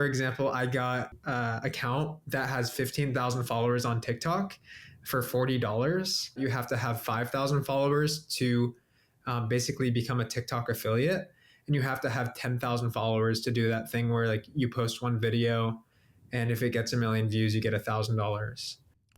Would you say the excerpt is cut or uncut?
cut